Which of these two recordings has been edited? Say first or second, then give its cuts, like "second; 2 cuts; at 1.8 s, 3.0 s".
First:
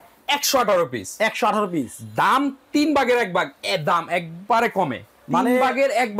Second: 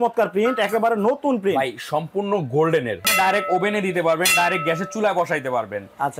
second; 1 cut; at 3.1 s